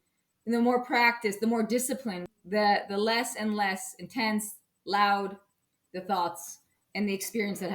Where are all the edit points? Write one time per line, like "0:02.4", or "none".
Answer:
0:02.3